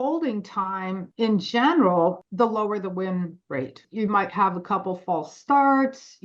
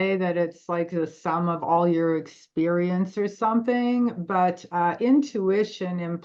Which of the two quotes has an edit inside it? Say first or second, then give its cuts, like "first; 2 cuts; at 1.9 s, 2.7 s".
first; 3 cuts; at 1.0 s, 2.2 s, 3.8 s